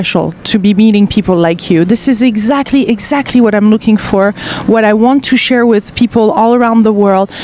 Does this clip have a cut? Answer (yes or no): yes